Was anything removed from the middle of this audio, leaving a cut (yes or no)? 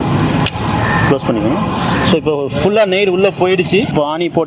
no